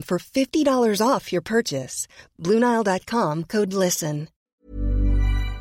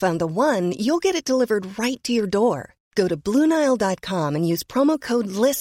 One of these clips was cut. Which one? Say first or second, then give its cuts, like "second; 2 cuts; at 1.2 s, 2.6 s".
first; 1 cut; at 4.6 s